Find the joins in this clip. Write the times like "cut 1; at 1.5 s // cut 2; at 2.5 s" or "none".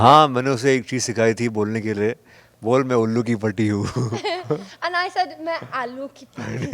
none